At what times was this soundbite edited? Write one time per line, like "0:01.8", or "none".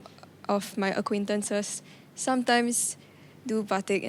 none